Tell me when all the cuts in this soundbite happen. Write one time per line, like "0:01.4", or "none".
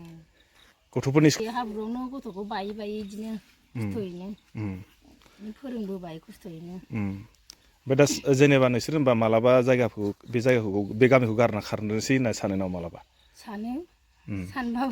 0:01.4